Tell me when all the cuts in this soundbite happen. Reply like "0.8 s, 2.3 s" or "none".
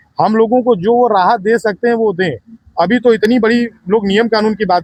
none